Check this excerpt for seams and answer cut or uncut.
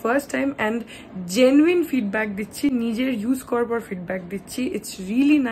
uncut